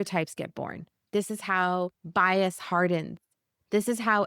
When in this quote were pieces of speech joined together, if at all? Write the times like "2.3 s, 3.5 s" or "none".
1.0 s, 2.0 s